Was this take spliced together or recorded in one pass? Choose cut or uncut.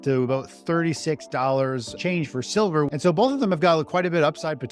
cut